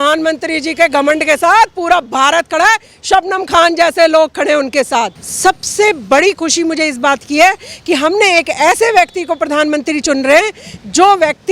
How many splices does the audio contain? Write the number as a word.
one